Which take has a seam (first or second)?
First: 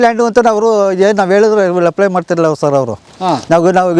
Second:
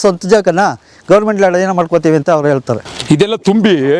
second